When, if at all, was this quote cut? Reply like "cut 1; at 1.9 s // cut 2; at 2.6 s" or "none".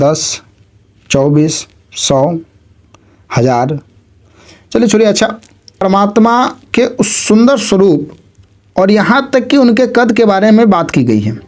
cut 1; at 5.8 s